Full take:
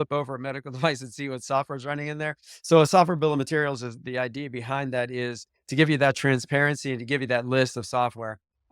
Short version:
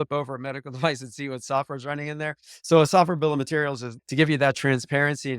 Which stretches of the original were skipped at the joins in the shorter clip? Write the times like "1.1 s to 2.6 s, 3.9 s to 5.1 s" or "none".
3.9 s to 5.5 s